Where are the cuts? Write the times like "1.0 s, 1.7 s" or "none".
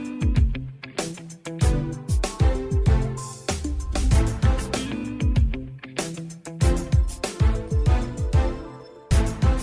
none